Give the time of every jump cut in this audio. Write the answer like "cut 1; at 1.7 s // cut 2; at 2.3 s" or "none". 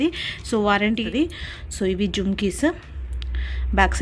cut 1; at 1.0 s